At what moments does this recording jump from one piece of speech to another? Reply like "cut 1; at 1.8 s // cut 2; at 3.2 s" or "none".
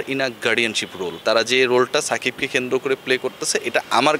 cut 1; at 1.2 s